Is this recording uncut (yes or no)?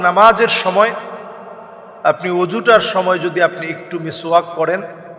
yes